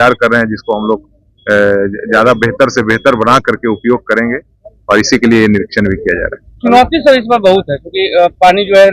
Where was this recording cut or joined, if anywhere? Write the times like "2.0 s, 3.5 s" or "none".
none